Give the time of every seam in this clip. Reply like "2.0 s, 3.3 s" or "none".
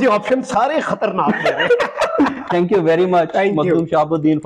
none